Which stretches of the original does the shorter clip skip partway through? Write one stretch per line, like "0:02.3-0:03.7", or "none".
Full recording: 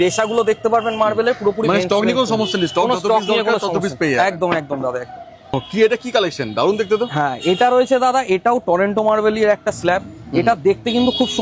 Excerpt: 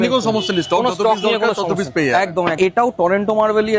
0:04.6-0:08.3